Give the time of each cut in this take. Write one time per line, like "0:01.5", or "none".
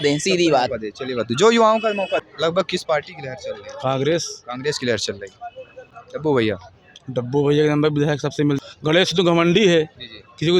0:02.3
0:08.6

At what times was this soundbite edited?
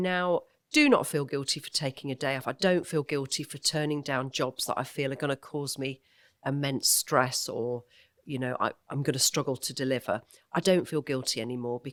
none

